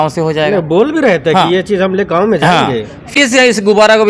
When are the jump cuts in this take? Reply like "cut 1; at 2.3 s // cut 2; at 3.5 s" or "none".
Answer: cut 1; at 3.1 s

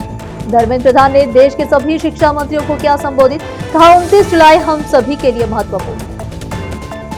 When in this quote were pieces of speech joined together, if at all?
none

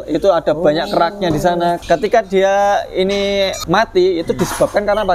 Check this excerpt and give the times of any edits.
cut 1; at 1.8 s // cut 2; at 3.6 s

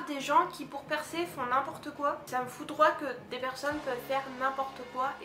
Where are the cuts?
cut 1; at 2.3 s

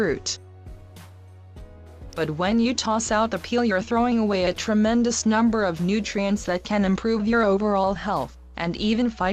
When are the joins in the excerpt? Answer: cut 1; at 1.6 s

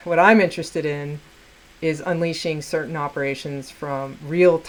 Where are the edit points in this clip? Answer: none

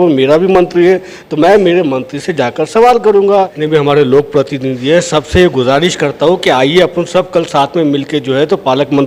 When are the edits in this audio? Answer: cut 1; at 3.6 s

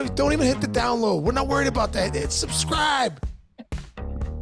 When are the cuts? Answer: cut 1; at 3.2 s

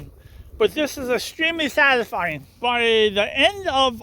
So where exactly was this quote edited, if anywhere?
cut 1; at 2.4 s

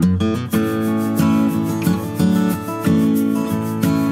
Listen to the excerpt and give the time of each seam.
none

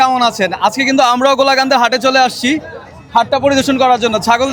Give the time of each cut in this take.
none

